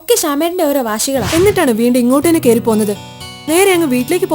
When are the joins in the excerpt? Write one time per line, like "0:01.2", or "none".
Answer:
0:01.3